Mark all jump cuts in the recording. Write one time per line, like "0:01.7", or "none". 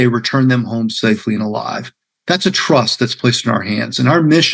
none

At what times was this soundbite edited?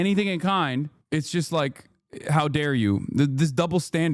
0:01.0

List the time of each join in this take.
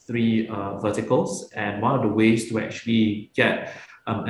none

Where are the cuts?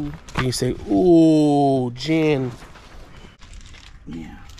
0:03.7

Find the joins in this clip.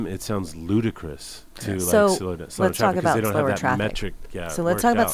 none

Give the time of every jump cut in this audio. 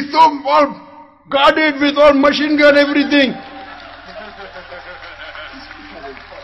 none

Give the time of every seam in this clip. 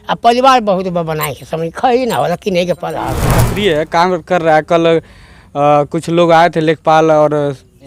0:03.4

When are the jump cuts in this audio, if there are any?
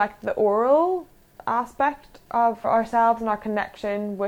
0:02.7

